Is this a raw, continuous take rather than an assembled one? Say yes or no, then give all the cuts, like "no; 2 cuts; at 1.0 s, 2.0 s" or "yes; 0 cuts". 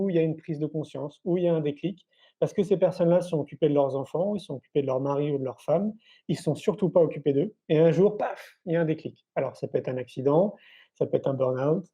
no; 1 cut; at 7.6 s